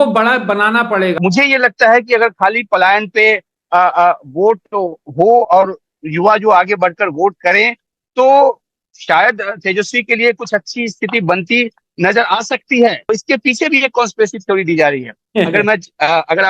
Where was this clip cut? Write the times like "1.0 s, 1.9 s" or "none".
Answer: 1.2 s, 13.0 s